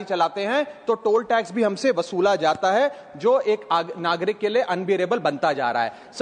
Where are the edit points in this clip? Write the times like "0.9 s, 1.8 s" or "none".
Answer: none